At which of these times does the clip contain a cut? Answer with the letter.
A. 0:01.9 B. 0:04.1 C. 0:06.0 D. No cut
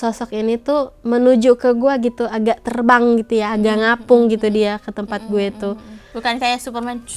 C